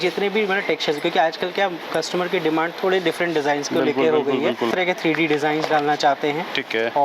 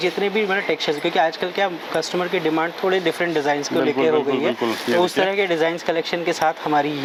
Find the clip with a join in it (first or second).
first